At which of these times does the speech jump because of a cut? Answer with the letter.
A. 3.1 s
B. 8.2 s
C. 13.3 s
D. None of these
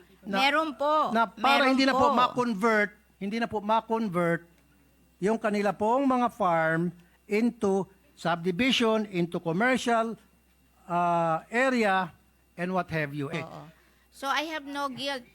C